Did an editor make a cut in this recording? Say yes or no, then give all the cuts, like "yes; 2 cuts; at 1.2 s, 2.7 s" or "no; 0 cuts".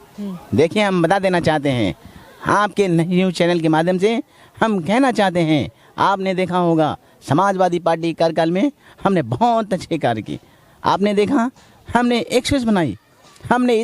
no; 0 cuts